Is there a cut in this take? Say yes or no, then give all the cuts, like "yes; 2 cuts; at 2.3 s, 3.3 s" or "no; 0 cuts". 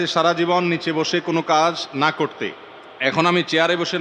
no; 0 cuts